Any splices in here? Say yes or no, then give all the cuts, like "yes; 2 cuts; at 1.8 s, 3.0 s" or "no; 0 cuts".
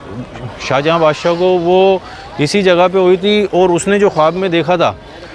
no; 0 cuts